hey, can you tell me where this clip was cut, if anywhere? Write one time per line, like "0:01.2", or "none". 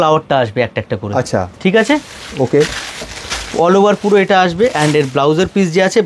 none